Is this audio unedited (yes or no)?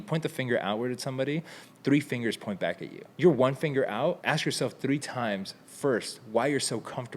no